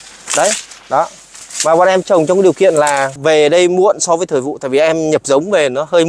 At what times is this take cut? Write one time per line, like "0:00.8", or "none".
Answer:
none